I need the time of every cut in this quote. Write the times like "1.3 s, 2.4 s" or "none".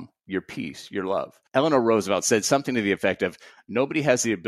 1.4 s